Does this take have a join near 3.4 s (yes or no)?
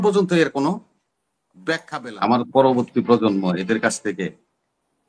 no